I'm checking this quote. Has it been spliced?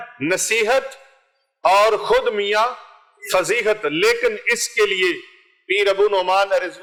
no; 0 cuts

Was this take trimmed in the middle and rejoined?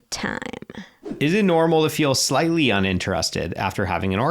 yes; 1 cut; at 1.1 s

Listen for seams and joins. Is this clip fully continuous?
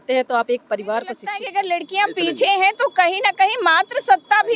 no; 1 cut; at 1.3 s

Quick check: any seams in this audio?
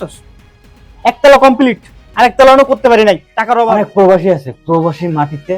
yes; 1 cut; at 3.6 s

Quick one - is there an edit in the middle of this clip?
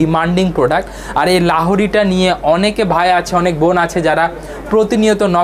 no; 0 cuts

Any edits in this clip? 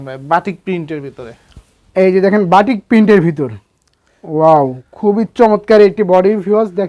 no; 0 cuts

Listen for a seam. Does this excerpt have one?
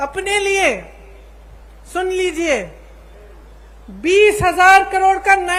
no; 0 cuts

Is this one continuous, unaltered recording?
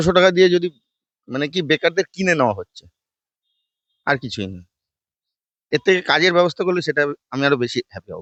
yes; 0 cuts

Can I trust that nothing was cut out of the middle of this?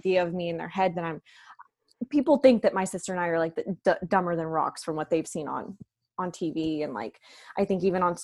yes; 0 cuts

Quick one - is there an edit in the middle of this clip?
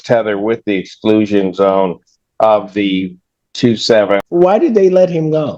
yes; 1 cut; at 4.2 s

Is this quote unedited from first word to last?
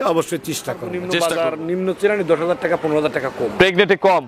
no; 1 cut; at 0.9 s

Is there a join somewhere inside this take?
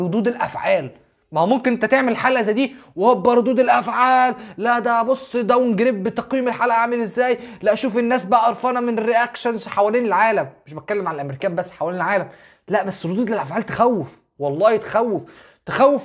no; 0 cuts

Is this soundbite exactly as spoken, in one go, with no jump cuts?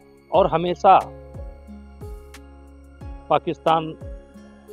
no; 2 cuts; at 1.7 s, 3.3 s

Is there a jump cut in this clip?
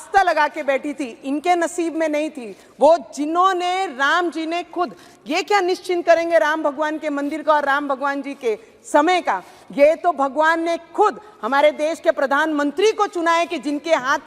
no; 0 cuts

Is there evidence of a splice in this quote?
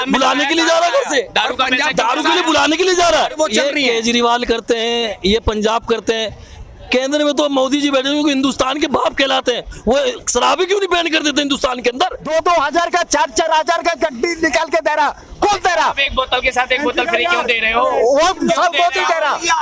yes; 2 cuts; at 3.3 s, 12.2 s

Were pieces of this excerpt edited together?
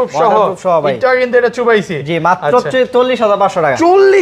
no; 0 cuts

